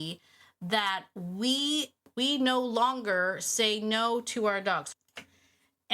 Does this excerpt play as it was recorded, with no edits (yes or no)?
no